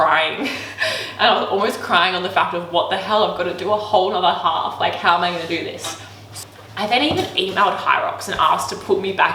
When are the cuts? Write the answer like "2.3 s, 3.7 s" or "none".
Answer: 6.2 s